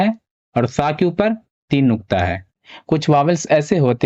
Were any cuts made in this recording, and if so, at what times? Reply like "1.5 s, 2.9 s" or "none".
2.7 s